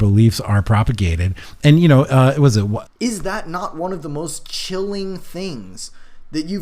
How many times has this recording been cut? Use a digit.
1